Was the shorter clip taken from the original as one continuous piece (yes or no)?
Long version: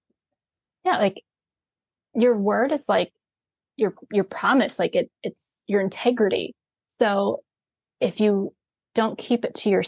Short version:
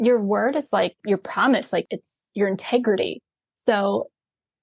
no